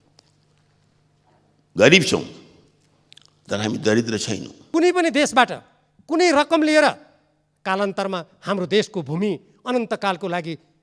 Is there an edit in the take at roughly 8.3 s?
no; 1 cut; at 4.5 s

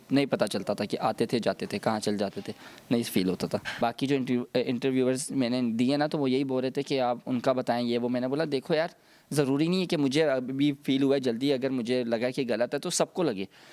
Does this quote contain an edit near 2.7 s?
no; 0 cuts

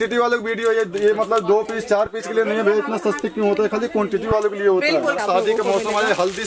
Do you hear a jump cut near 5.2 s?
yes; 1 cut; at 5.2 s

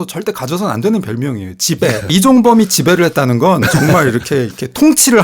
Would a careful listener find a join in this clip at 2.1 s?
yes; 1 cut; at 2.1 s

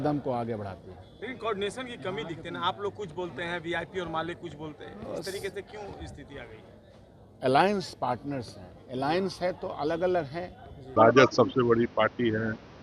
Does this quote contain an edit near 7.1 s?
no; 1 cut; at 10.8 s

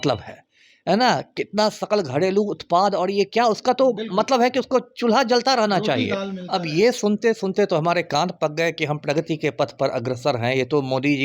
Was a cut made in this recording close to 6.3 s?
yes; 1 cut; at 6.3 s

